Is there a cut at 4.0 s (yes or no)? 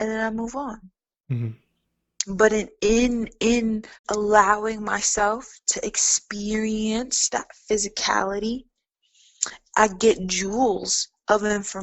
yes